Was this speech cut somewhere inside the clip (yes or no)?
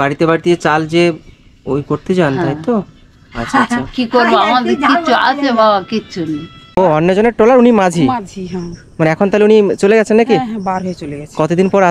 yes